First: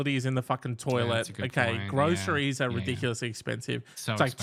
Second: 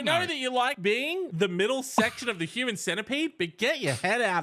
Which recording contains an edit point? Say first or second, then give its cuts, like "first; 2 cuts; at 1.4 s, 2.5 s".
second; 1 cut; at 0.9 s